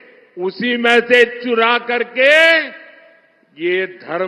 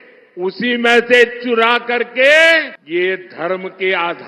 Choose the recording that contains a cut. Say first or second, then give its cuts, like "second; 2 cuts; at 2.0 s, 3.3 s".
second; 1 cut; at 2.8 s